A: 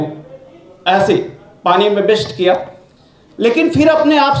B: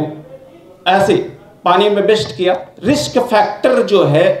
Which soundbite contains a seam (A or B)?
B